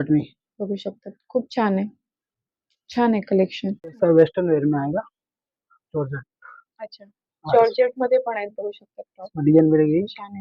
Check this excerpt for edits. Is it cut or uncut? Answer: uncut